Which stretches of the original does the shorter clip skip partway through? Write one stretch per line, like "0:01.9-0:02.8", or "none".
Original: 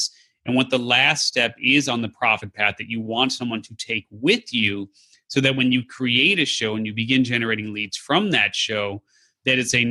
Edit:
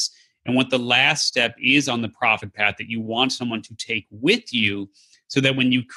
none